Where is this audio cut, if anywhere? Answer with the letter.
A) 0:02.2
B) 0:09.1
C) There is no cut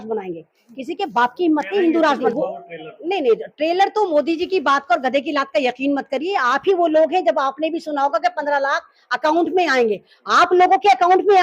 A